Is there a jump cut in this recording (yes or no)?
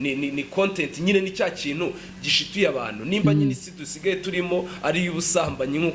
no